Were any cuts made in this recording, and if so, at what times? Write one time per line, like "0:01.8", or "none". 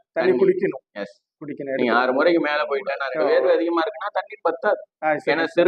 0:03.0